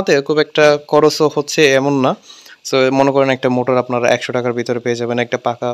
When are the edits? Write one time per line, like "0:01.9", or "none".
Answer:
none